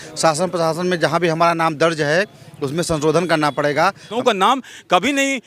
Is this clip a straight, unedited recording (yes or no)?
no